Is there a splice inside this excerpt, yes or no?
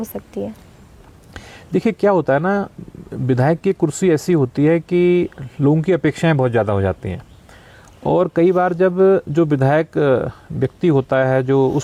no